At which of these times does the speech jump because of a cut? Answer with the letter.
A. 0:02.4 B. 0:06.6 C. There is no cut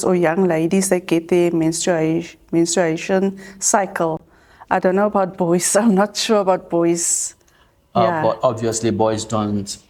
C